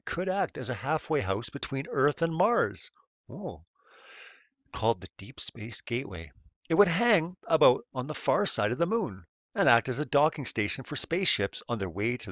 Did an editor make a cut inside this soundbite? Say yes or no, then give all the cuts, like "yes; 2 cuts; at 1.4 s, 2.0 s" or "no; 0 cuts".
no; 0 cuts